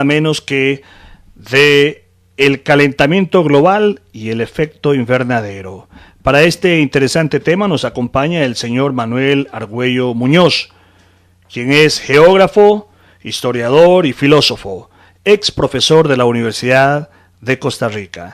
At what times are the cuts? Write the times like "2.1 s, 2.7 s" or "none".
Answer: 10.0 s